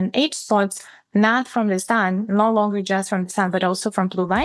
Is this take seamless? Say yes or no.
yes